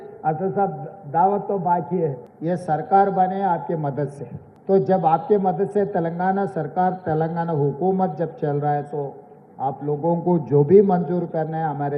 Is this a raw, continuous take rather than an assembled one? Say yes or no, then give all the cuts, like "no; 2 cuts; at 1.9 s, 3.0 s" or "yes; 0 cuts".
no; 1 cut; at 2.3 s